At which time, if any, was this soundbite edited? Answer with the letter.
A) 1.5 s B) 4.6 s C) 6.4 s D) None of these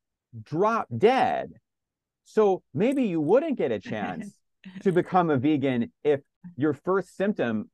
C